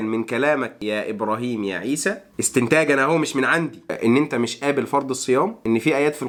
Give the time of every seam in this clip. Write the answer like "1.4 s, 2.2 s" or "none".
none